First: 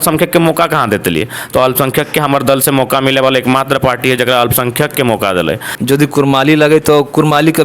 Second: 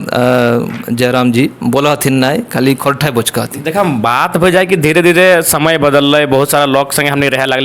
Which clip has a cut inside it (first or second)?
first